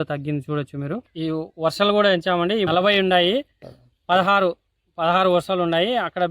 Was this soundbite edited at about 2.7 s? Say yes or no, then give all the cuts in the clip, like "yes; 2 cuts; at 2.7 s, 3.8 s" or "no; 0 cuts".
yes; 1 cut; at 2.7 s